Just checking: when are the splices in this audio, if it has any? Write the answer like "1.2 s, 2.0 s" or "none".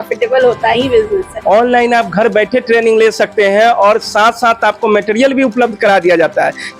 1.3 s